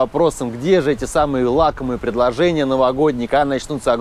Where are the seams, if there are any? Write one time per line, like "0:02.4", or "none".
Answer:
none